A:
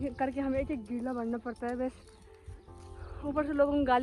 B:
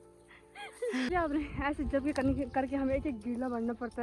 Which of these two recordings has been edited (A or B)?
B